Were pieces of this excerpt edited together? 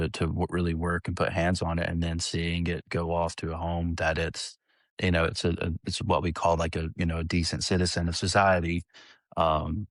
no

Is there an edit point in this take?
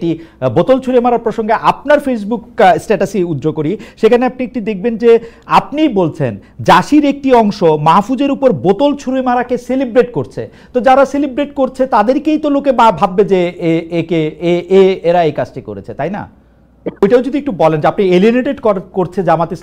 yes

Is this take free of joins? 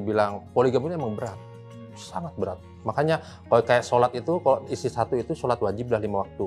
yes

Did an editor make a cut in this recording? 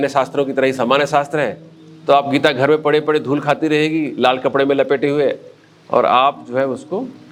no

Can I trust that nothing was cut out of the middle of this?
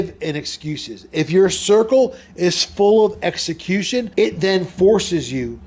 no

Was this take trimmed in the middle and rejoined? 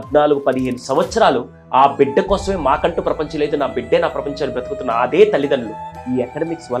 yes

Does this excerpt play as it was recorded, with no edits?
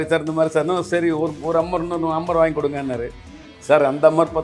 yes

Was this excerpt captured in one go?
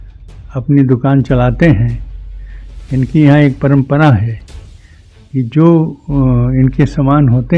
yes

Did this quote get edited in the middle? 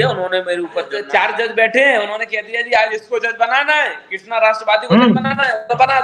yes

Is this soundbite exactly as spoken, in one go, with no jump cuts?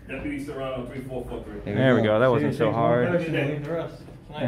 yes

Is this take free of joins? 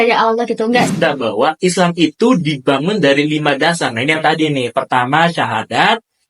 no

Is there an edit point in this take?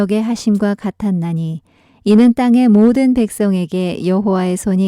yes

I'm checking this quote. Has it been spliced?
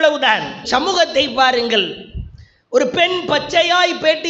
no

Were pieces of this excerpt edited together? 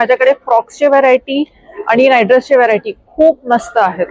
no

